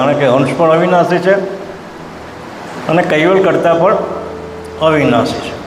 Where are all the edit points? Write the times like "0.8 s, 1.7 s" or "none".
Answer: none